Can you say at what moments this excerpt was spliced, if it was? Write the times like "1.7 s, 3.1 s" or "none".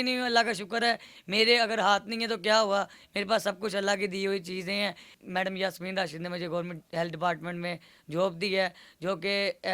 5.1 s

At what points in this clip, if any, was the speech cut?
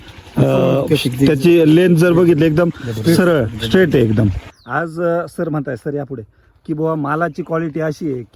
4.5 s

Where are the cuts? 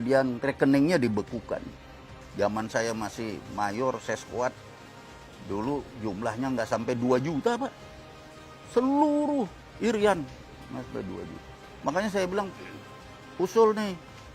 2.2 s

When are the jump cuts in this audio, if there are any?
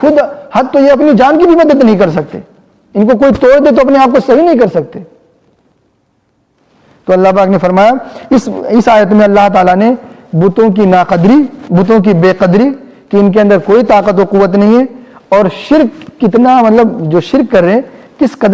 none

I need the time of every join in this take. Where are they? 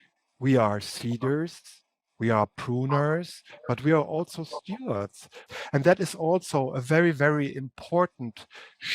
5.4 s

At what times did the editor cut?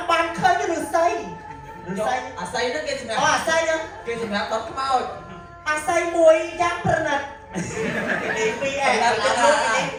none

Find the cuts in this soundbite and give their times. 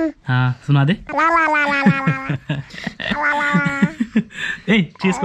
1.0 s

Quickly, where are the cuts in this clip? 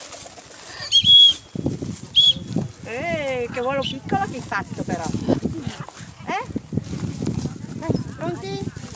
none

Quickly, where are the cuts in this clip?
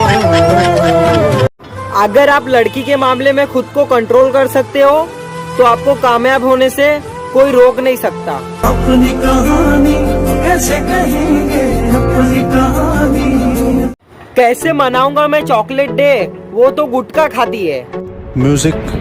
1.5 s

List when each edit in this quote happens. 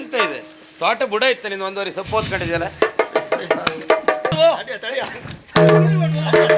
4.3 s

